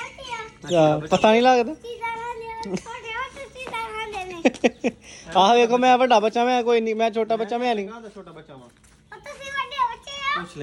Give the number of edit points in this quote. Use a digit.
0